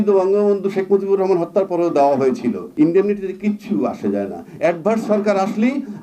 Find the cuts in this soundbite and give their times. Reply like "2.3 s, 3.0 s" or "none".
2.6 s